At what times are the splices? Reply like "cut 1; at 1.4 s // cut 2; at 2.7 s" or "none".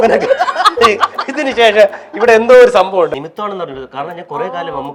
cut 1; at 3.1 s